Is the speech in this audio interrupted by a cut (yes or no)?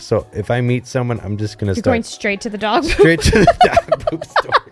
no